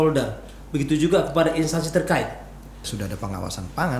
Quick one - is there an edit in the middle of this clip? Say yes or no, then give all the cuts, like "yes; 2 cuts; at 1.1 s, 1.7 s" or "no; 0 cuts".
yes; 1 cut; at 2.8 s